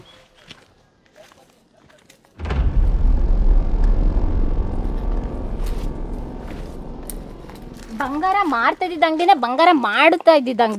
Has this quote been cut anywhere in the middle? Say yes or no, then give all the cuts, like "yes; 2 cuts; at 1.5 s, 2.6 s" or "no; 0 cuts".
no; 0 cuts